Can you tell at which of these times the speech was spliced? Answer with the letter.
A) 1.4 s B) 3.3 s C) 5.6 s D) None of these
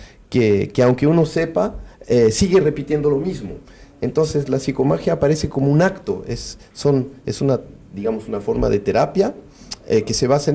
D